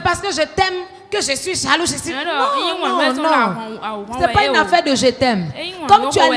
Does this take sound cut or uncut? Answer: uncut